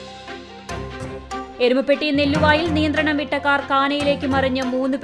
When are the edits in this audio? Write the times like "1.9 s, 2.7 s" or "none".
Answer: none